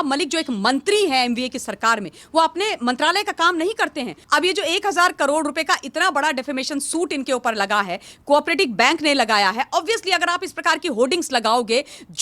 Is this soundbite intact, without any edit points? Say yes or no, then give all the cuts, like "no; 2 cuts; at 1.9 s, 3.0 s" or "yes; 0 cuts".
no; 1 cut; at 4.2 s